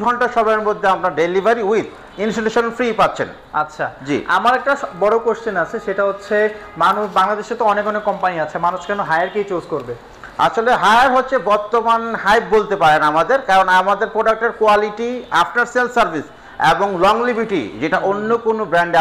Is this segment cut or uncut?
uncut